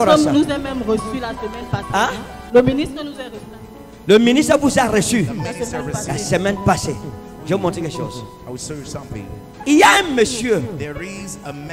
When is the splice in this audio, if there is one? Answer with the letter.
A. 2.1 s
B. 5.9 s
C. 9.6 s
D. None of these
C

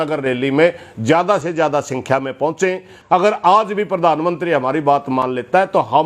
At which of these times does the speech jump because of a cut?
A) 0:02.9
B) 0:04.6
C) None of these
A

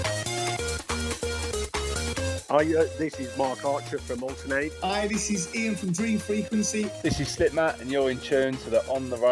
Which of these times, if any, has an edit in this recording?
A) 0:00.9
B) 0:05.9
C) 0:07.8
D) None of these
D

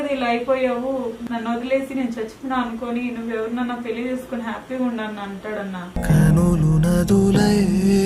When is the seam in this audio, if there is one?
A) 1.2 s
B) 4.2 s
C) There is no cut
A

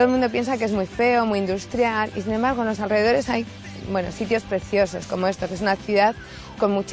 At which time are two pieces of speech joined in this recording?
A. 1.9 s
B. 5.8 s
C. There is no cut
C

